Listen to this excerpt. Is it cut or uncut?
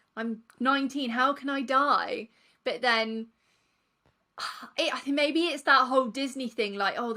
uncut